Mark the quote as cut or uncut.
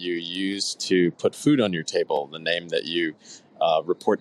uncut